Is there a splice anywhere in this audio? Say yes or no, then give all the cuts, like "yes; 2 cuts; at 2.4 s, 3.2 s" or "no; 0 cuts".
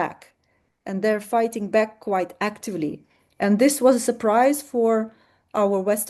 no; 0 cuts